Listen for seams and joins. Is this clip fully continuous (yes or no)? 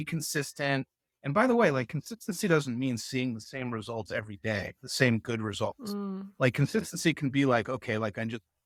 yes